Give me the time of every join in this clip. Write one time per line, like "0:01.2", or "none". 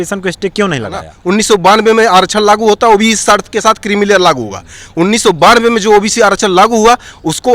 0:01.1